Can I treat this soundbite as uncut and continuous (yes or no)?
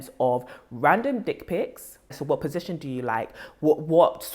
no